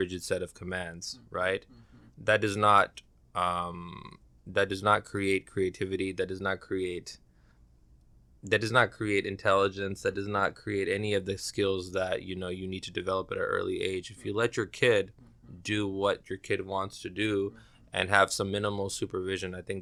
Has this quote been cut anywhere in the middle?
no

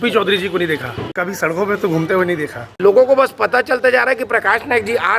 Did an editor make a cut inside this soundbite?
yes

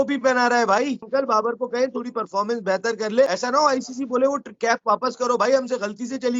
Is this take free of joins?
no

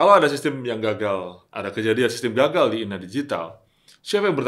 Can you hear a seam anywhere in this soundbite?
yes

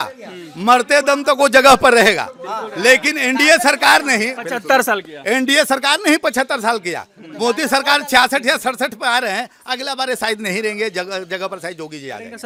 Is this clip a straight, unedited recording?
yes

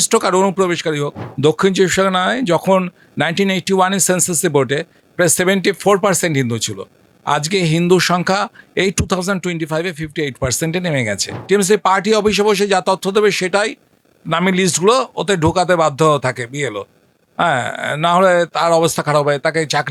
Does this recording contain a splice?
yes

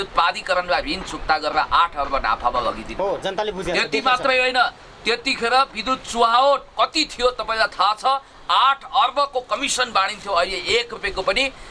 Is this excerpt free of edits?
yes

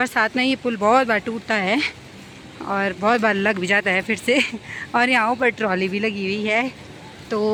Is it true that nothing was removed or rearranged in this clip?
yes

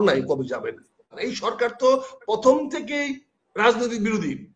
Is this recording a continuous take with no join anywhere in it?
no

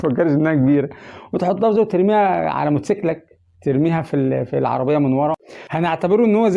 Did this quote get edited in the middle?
yes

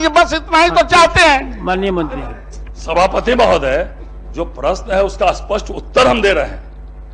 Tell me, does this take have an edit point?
no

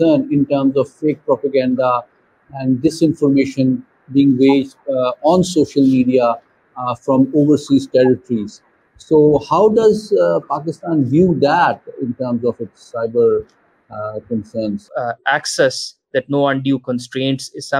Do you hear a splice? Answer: yes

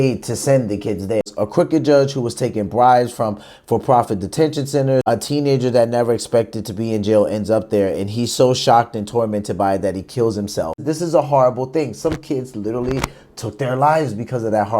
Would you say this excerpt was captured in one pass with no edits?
no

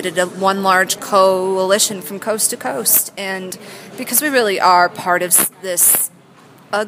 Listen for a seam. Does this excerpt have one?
no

